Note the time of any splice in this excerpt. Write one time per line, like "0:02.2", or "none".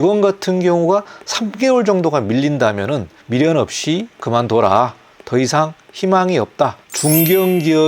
0:06.9